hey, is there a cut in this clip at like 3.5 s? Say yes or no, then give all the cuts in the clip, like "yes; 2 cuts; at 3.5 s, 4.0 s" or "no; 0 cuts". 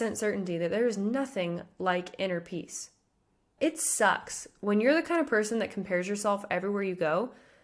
yes; 1 cut; at 3.5 s